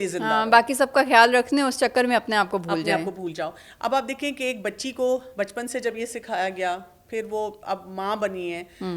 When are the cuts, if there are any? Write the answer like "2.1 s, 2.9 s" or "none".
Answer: none

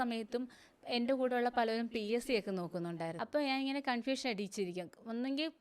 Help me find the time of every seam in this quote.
3.2 s

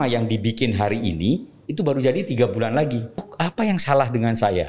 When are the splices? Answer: 3.3 s

